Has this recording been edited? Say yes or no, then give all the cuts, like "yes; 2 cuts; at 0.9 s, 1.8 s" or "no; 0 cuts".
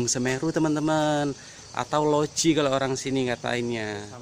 no; 0 cuts